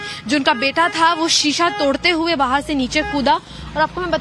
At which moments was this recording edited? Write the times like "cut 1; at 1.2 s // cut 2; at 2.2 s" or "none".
cut 1; at 2.7 s